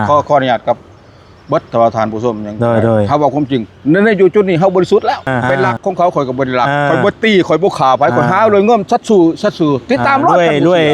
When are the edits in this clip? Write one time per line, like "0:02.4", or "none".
0:05.4